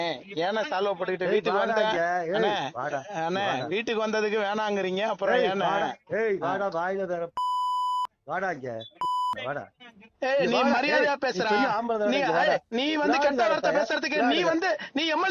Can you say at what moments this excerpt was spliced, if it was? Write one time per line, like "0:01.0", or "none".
0:10.0